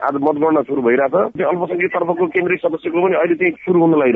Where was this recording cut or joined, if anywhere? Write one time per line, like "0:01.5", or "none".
0:01.4